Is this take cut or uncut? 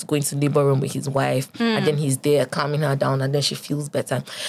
uncut